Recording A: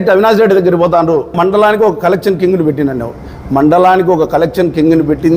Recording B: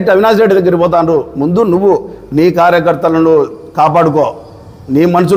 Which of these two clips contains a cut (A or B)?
A